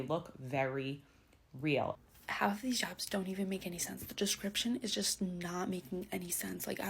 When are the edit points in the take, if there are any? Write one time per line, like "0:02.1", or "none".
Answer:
0:02.0